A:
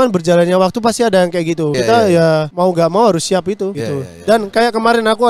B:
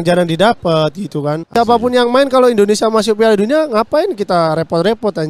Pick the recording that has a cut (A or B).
B